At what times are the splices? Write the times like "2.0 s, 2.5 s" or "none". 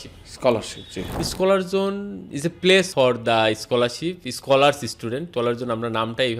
1.1 s, 2.9 s, 5.3 s